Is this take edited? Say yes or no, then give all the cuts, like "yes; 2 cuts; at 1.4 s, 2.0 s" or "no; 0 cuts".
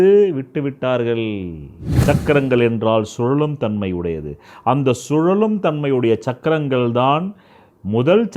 yes; 1 cut; at 1.8 s